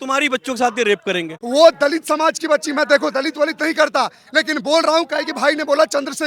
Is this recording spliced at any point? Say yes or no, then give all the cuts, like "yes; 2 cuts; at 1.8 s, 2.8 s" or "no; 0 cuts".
yes; 1 cut; at 1.3 s